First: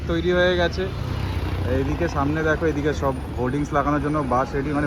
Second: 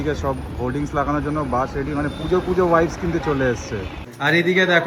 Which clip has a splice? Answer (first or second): second